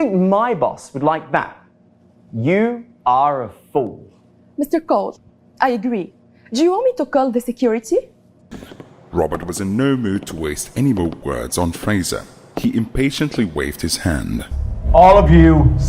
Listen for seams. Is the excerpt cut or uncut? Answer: cut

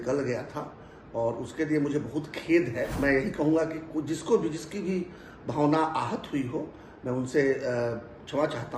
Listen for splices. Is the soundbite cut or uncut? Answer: cut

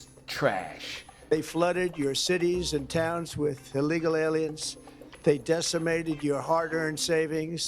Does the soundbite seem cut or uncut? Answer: cut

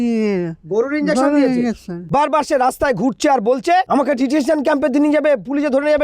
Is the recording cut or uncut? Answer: cut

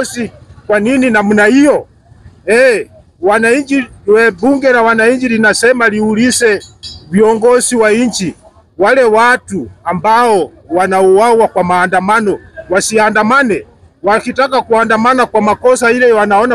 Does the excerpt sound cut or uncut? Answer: uncut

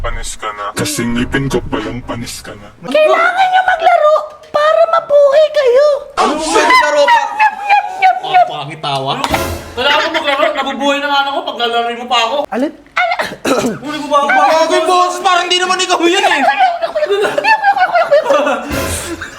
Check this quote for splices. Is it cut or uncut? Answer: cut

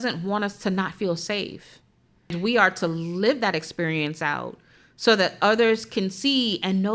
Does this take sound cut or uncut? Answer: cut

